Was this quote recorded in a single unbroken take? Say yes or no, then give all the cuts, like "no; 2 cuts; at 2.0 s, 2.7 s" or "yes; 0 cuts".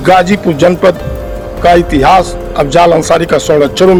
yes; 0 cuts